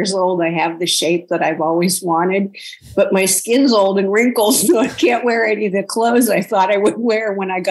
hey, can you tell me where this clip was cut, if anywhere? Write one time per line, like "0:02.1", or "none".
none